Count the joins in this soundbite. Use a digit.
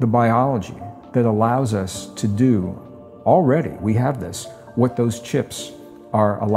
0